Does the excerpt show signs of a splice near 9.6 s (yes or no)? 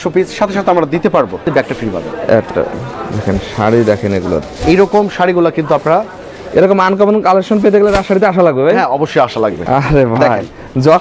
yes